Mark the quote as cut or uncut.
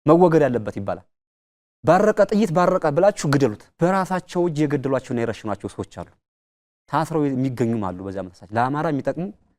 cut